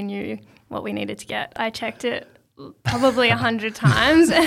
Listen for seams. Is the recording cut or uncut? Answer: cut